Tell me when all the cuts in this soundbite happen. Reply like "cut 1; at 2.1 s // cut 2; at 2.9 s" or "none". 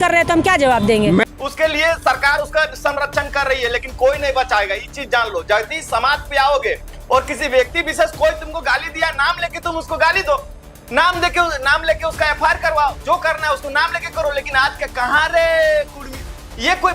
cut 1; at 1.2 s